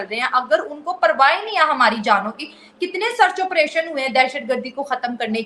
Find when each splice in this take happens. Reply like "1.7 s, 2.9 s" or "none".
none